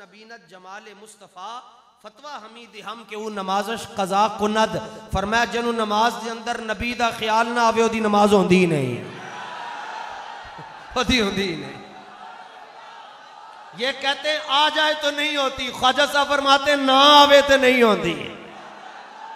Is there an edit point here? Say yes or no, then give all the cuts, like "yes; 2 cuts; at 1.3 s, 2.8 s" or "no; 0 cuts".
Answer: no; 0 cuts